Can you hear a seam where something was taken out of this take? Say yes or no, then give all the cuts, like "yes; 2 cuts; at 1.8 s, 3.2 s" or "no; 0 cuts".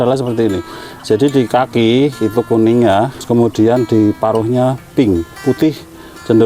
yes; 1 cut; at 3.2 s